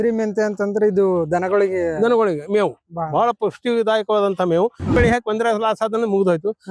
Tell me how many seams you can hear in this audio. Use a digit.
1